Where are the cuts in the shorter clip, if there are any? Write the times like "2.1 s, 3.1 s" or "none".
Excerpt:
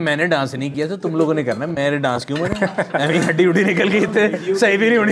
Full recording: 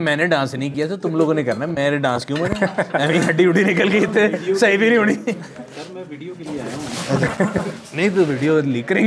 none